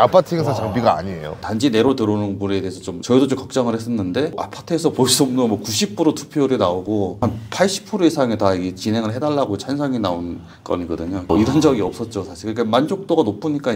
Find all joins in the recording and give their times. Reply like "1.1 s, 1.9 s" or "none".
1.3 s